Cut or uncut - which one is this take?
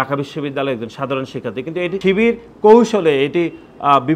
cut